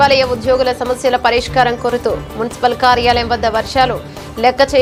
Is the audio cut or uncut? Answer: uncut